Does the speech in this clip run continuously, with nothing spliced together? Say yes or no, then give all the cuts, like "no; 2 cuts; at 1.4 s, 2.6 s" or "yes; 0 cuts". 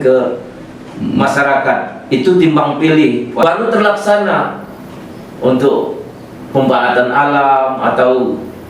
no; 1 cut; at 3.4 s